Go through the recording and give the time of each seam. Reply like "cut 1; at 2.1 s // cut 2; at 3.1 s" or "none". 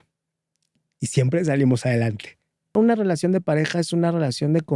cut 1; at 2.7 s